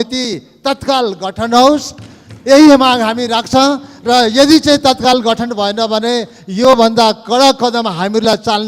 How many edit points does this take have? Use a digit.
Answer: 0